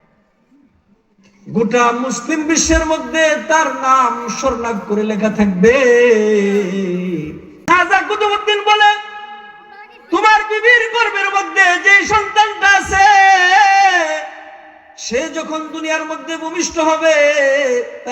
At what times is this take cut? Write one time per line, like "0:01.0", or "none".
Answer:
0:07.5

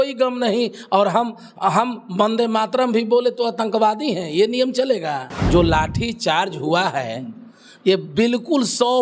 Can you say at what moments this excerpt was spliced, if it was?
0:05.3

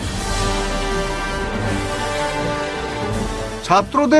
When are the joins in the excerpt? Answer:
0:03.1

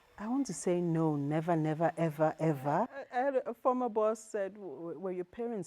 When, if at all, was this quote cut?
0:03.0

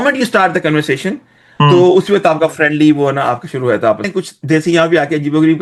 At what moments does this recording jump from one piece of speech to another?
0:04.0

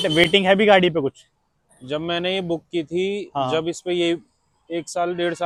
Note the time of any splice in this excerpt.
none

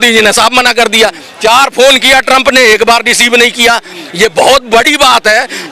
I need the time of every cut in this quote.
none

